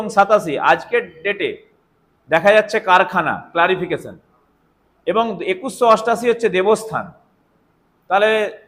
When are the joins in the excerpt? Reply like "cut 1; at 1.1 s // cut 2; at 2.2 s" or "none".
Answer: none